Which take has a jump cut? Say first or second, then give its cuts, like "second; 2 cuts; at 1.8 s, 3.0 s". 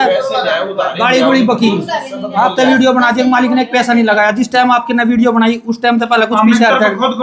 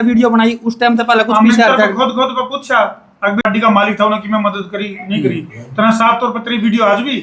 second; 1 cut; at 3.4 s